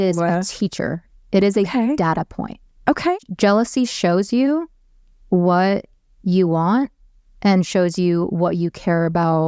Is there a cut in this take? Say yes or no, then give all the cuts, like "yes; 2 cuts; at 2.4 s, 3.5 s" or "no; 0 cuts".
yes; 1 cut; at 3.1 s